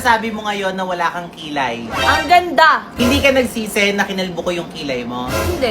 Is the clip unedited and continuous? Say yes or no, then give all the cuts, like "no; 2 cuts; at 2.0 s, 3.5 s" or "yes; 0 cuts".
no; 1 cut; at 2.9 s